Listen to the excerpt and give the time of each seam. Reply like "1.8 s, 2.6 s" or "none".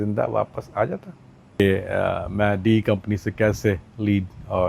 1.6 s